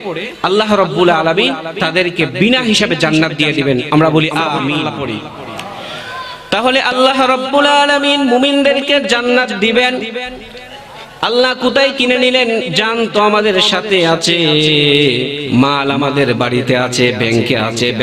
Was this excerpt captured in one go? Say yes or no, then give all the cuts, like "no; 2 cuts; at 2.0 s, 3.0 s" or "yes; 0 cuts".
no; 1 cut; at 4.8 s